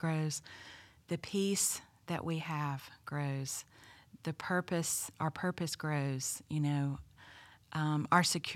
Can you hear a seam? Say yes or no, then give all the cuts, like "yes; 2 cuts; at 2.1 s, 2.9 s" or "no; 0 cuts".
no; 0 cuts